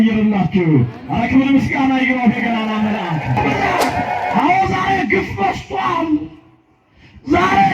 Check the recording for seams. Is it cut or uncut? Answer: cut